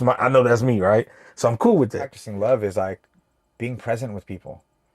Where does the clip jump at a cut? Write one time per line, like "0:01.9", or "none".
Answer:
0:02.2